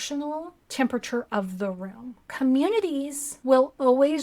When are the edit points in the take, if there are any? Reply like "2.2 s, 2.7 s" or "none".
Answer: 2.3 s